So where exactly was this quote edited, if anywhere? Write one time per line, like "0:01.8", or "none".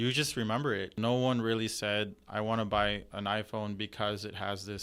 0:01.0